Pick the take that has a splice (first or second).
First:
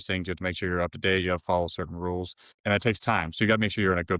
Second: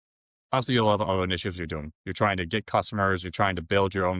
first